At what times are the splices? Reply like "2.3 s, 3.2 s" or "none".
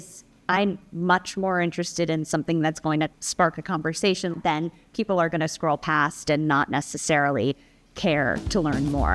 3.2 s, 4.3 s